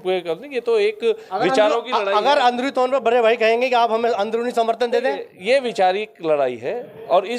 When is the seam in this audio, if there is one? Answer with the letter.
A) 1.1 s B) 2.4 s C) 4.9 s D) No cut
D